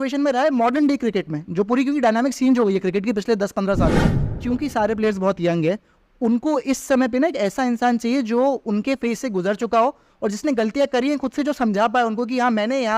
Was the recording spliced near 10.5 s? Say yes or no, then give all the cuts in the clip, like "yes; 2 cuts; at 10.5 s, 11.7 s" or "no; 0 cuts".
no; 1 cut; at 4.3 s